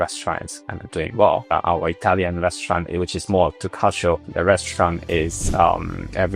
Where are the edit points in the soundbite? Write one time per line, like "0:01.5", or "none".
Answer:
0:01.5

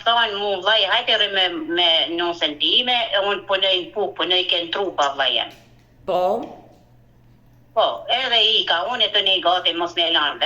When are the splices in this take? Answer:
none

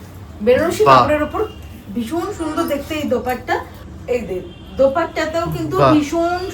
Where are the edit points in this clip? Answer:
0:03.8

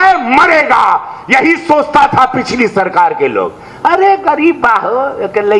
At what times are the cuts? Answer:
none

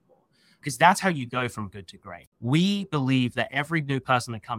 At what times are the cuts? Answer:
0:02.2

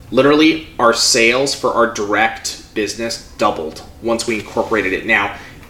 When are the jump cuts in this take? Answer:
none

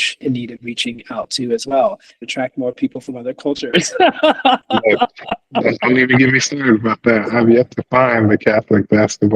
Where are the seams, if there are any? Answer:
0:02.3

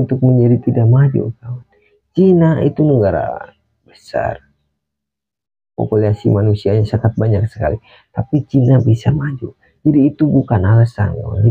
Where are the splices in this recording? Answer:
none

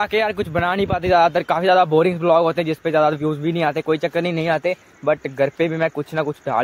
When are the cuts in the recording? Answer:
none

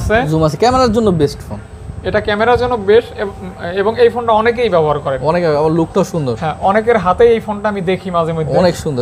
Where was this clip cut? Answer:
none

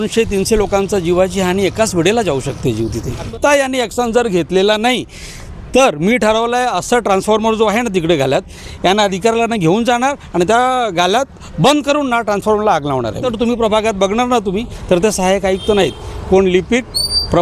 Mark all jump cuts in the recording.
0:03.3
0:13.3

